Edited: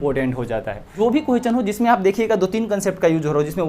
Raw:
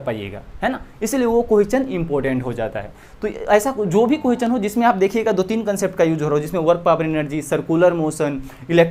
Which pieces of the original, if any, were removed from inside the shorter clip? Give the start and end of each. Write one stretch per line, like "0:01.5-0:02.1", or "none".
0:03.0-0:03.9